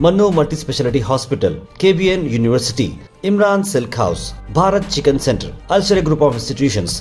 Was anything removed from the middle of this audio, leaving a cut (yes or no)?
no